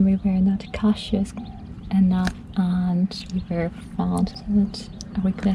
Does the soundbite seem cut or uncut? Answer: cut